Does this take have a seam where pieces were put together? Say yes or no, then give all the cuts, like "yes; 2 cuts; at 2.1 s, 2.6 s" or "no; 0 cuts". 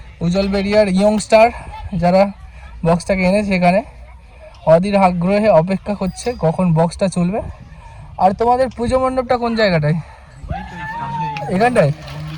no; 0 cuts